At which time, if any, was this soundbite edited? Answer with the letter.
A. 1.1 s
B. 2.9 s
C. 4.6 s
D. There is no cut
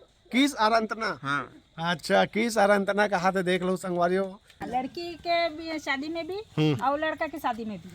C